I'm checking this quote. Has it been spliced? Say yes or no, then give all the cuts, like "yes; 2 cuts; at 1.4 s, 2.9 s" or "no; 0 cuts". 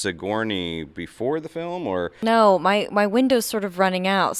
yes; 1 cut; at 2.1 s